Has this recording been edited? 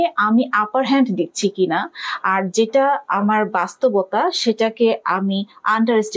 no; 0 cuts

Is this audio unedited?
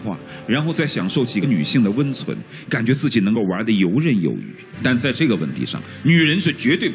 yes; 0 cuts

